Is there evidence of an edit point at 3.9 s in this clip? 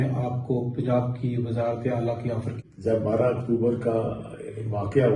no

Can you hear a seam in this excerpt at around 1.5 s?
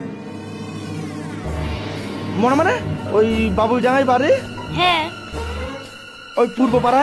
no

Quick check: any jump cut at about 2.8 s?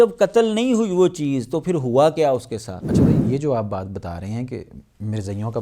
yes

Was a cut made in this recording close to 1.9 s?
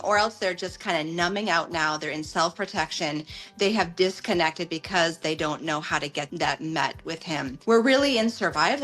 no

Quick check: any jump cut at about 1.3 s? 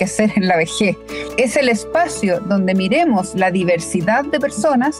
yes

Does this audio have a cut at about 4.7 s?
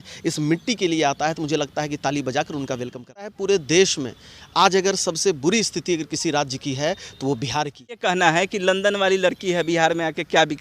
no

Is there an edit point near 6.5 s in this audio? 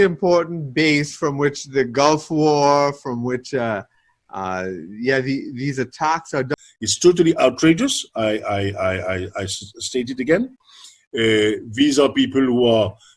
yes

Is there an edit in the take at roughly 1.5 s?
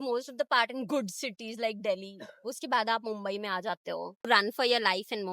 no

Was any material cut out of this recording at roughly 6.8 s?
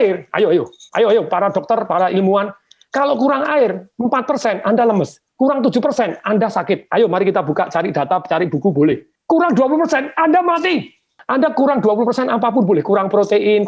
no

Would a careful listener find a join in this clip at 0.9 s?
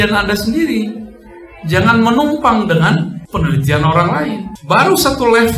no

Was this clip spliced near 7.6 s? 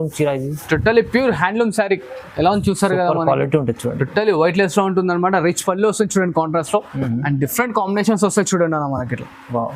no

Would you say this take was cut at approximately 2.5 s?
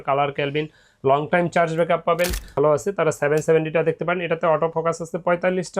yes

